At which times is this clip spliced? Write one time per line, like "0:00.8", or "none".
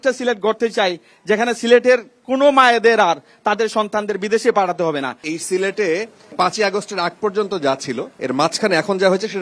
0:05.3
0:06.3